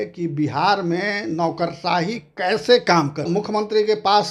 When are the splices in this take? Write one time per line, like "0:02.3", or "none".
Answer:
0:03.3